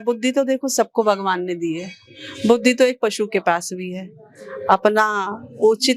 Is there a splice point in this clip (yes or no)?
no